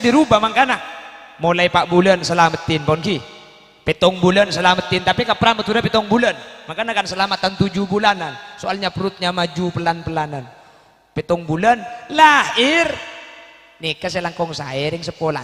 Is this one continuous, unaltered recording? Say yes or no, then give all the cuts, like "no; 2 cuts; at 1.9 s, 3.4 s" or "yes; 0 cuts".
yes; 0 cuts